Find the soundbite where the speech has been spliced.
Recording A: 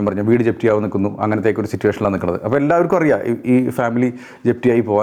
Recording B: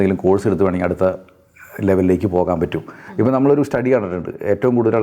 B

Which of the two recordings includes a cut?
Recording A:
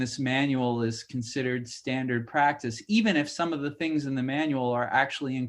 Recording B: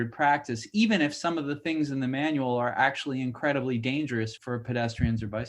B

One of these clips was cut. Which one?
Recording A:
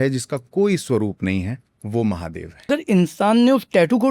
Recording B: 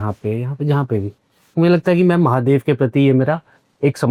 A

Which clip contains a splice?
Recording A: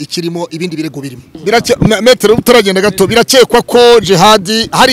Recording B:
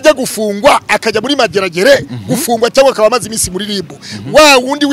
A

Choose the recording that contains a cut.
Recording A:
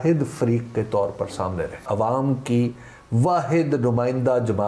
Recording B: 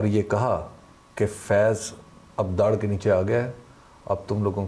A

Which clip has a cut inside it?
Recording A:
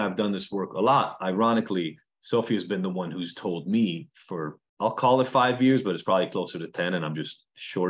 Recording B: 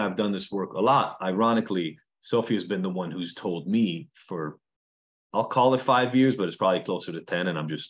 A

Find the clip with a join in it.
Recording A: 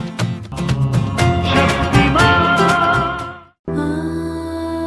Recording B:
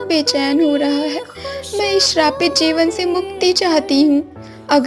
A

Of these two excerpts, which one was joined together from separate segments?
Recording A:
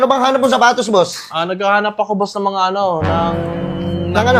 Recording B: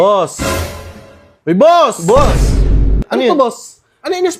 B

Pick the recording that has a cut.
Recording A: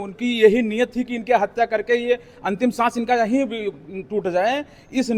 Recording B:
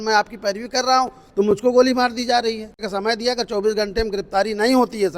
B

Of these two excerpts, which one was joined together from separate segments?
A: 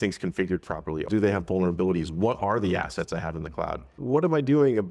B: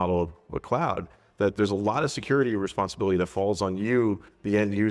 A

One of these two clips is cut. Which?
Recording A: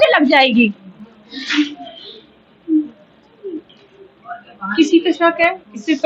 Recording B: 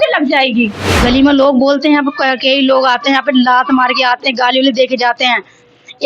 B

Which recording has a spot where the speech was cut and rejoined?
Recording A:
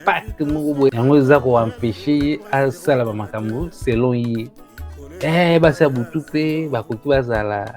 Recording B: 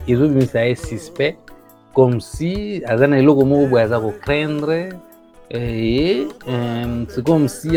A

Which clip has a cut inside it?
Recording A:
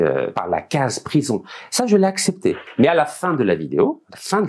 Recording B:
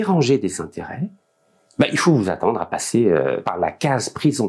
A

